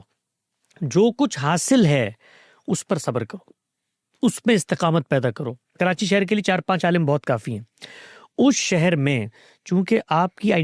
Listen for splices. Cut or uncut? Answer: cut